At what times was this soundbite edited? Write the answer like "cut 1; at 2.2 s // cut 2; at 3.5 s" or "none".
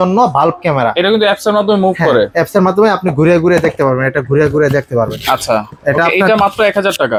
none

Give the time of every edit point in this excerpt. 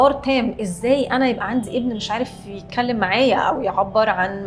none

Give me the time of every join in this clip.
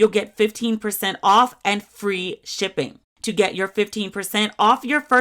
cut 1; at 3.1 s

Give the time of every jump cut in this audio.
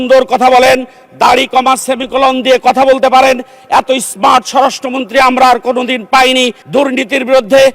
cut 1; at 6.6 s

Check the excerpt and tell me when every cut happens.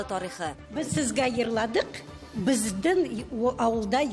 none

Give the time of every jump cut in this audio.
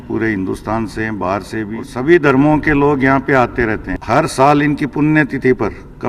cut 1; at 1.8 s // cut 2; at 3.9 s

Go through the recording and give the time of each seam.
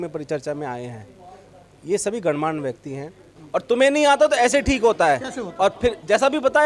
cut 1; at 3.3 s

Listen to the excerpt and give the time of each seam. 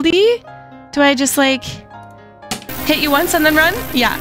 none

